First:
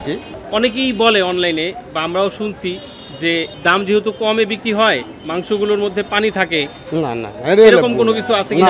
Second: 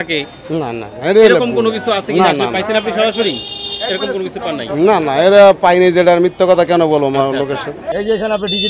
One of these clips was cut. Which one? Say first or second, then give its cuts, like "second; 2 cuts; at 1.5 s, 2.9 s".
second; 1 cut; at 7.8 s